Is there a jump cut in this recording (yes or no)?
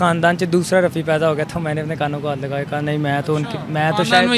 no